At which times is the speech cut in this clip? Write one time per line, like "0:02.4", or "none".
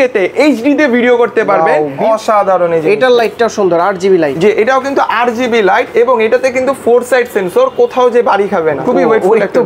0:01.9
0:08.8